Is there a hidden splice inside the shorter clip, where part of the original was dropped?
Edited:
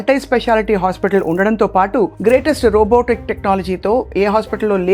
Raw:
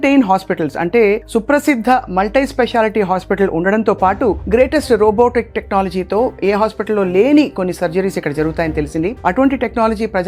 no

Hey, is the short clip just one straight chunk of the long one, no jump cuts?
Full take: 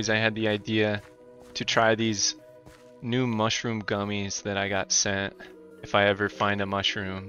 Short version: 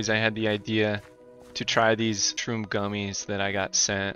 no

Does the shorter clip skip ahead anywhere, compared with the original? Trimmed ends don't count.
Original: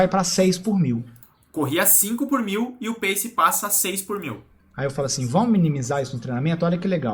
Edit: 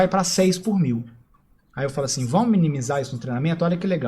yes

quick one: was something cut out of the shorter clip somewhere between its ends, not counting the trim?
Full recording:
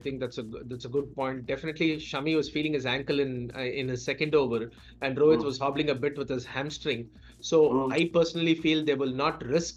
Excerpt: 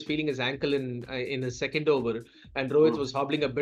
no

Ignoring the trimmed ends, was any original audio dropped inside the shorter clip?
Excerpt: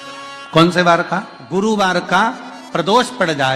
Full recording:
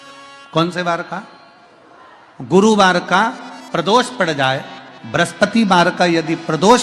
yes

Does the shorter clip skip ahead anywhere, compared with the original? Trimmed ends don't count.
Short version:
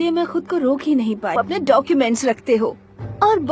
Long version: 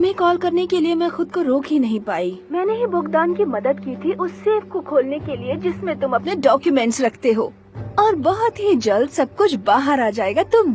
yes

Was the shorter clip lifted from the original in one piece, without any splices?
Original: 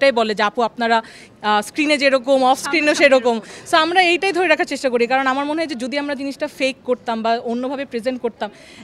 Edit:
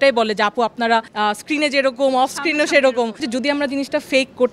no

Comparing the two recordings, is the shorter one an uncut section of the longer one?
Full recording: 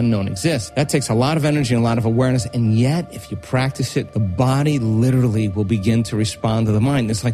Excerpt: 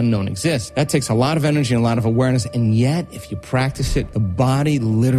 yes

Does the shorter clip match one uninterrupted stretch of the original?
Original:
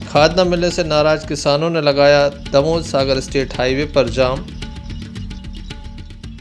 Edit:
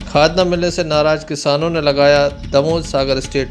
yes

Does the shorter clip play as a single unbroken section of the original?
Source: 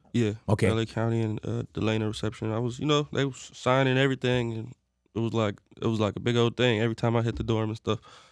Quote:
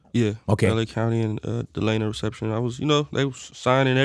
yes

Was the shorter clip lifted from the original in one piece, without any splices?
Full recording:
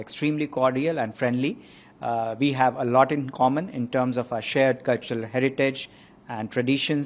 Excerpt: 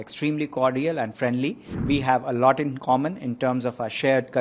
no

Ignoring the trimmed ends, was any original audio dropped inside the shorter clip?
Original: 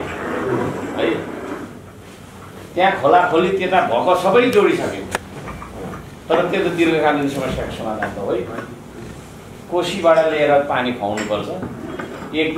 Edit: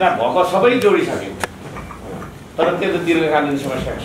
no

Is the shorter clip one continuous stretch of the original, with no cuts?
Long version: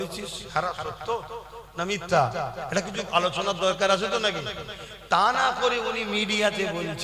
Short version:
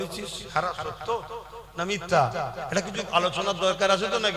yes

